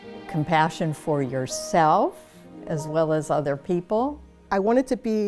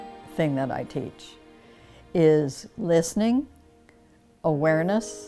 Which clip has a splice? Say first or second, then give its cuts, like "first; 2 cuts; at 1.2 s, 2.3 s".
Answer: first; 1 cut; at 4.2 s